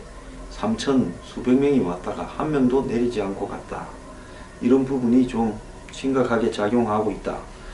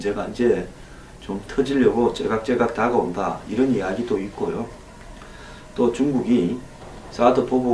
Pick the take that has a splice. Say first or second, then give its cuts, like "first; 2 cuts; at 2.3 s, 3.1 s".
second; 1 cut; at 6.5 s